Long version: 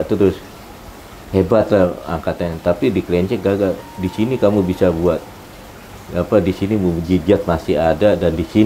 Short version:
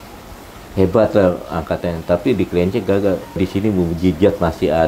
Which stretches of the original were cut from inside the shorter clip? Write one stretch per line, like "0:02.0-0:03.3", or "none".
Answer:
0:03.9-0:06.4